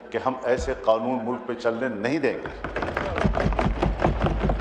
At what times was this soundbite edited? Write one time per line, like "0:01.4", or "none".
none